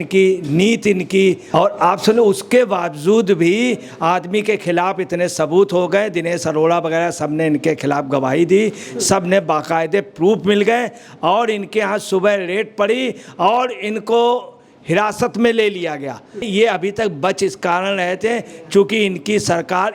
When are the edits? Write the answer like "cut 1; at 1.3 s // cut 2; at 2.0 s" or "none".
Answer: cut 1; at 16.5 s